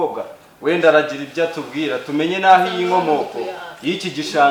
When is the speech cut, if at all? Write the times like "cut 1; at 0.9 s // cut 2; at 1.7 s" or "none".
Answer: none